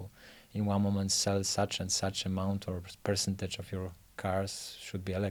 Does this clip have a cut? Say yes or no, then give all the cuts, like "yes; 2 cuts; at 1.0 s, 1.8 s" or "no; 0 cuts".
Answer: no; 0 cuts